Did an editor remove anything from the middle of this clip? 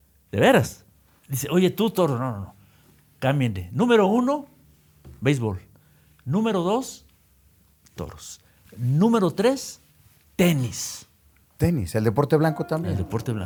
no; 0 cuts

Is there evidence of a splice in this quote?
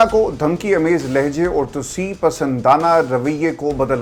no; 0 cuts

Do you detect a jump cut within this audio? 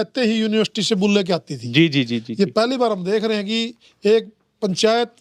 no; 0 cuts

